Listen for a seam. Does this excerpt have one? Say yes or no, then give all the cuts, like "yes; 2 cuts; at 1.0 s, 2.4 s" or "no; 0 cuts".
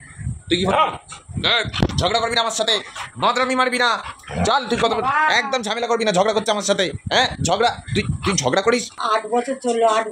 yes; 1 cut; at 8.9 s